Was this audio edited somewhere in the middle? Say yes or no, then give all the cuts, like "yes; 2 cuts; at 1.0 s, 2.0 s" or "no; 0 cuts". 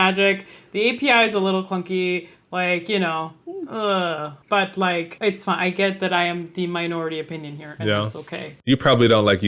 yes; 3 cuts; at 4.3 s, 5.1 s, 8.5 s